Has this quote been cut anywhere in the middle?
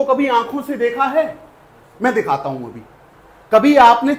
no; 0 cuts

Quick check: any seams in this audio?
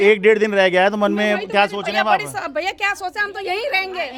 no; 0 cuts

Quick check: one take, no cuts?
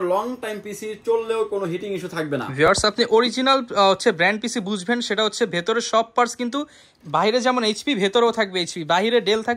yes; 0 cuts

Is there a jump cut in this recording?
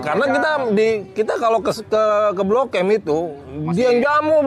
no; 0 cuts

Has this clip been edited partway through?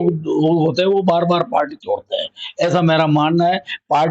no; 0 cuts

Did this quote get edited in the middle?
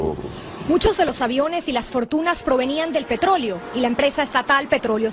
yes; 1 cut; at 2.1 s

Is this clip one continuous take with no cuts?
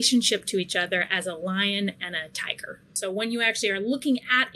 no; 1 cut; at 3.0 s

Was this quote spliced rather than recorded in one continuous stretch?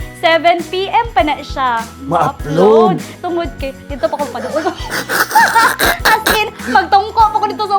no; 0 cuts

